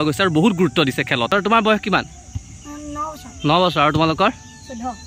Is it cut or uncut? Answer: cut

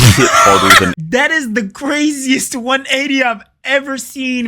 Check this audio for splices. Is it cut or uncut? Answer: cut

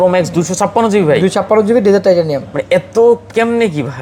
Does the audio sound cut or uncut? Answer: uncut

